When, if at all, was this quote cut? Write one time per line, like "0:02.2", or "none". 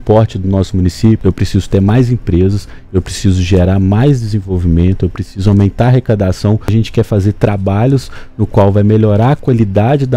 0:01.2
0:06.7